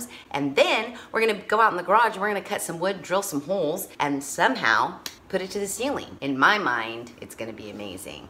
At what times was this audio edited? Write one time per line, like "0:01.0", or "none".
0:06.1